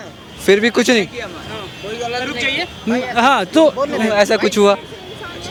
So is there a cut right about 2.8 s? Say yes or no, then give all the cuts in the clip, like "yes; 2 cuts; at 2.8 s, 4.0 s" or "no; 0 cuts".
no; 0 cuts